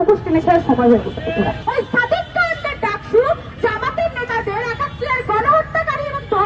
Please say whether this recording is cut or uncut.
cut